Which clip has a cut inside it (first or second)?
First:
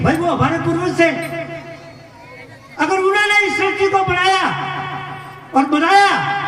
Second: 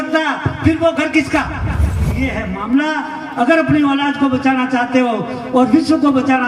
second